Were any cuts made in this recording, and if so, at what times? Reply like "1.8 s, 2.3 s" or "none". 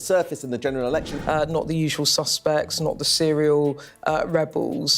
1.1 s